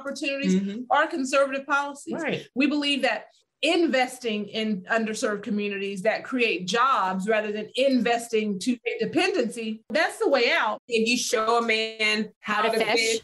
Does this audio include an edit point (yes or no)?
yes